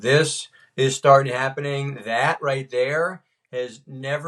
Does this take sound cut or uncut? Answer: uncut